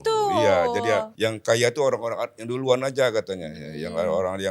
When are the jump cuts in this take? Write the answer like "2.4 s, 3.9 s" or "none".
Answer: 1.1 s